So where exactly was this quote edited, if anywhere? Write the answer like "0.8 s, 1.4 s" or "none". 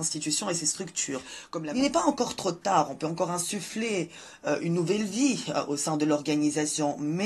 1.4 s